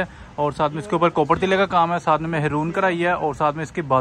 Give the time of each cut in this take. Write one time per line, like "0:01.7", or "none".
none